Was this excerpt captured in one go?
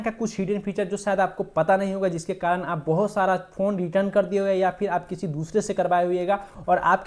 yes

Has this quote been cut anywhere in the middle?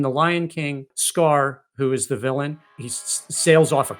yes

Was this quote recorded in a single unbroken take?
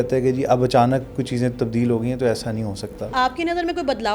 no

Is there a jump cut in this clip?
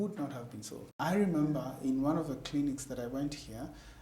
yes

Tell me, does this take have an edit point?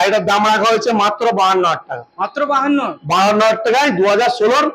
no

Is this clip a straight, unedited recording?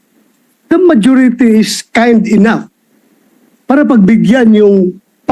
yes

